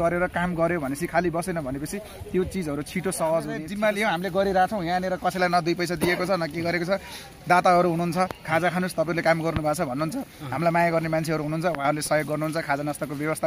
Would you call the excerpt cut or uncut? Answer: cut